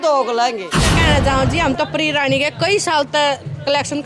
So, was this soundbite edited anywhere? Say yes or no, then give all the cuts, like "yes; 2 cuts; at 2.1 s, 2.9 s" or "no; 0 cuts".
yes; 1 cut; at 0.9 s